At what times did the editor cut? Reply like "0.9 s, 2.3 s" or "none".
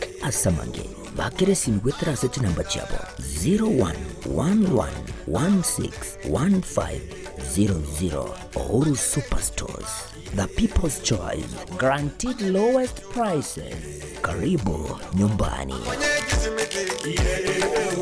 15.8 s